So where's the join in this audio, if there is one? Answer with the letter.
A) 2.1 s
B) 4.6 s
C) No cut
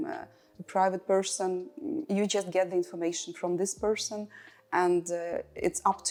C